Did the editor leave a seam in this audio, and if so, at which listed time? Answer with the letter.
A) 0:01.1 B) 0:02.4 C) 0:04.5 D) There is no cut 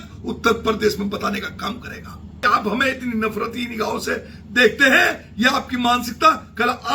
B